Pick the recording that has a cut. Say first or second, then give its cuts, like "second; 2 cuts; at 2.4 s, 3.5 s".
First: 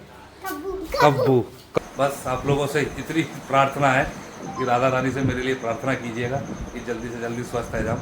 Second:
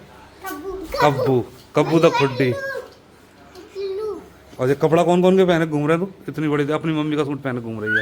first; 1 cut; at 1.8 s